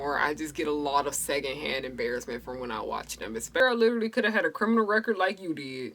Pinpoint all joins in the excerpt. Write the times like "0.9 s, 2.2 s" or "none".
3.6 s